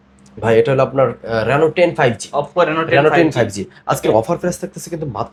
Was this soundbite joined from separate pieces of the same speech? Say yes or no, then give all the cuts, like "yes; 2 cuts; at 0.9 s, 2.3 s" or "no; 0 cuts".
no; 0 cuts